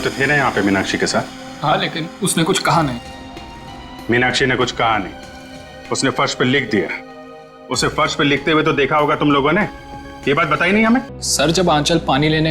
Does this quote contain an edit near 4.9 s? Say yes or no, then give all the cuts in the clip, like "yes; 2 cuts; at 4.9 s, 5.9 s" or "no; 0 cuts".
no; 1 cut; at 11.2 s